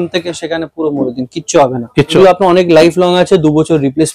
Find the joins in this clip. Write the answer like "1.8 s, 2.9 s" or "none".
2.2 s